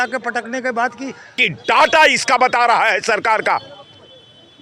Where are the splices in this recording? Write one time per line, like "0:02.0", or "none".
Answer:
0:01.4